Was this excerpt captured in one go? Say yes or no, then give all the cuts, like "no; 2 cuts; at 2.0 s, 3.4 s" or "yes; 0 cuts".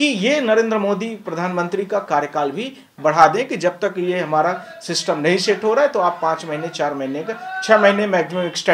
yes; 0 cuts